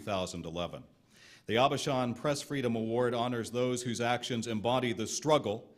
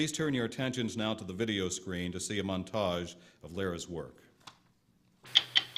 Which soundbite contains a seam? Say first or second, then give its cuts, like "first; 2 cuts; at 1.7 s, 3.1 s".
first; 1 cut; at 1.5 s